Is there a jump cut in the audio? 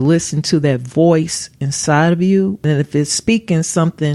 yes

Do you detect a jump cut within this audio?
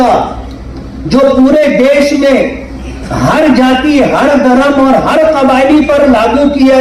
no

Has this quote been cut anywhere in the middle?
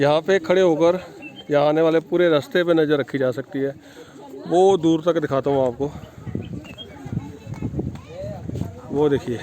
no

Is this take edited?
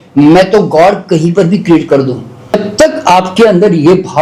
yes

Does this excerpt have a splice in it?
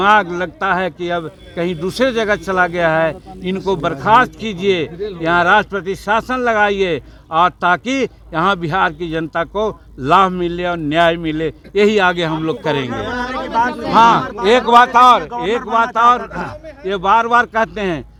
no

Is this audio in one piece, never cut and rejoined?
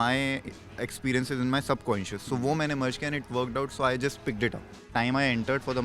no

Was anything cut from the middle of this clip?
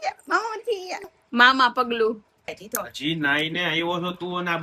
yes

